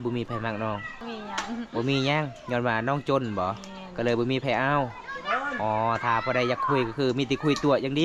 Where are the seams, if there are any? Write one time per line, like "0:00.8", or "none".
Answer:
0:01.0